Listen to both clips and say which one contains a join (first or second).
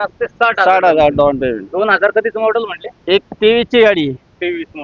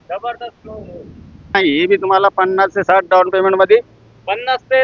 second